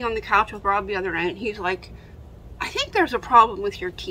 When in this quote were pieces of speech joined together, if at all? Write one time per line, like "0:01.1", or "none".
none